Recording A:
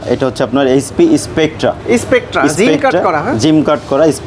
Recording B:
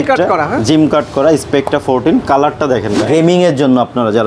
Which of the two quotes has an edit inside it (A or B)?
B